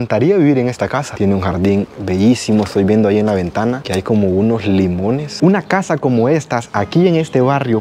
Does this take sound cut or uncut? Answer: cut